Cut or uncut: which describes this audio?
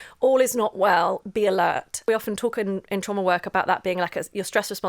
cut